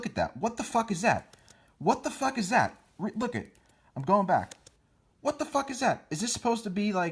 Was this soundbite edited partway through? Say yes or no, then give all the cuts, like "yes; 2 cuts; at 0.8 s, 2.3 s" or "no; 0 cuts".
yes; 1 cut; at 6.0 s